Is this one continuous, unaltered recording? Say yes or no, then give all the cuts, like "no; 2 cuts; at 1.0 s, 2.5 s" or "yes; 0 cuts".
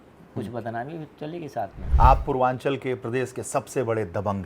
no; 1 cut; at 1.8 s